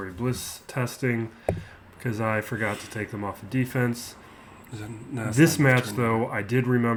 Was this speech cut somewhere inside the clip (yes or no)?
no